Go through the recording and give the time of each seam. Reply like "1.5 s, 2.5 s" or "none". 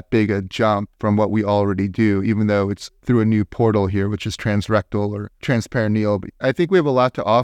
6.3 s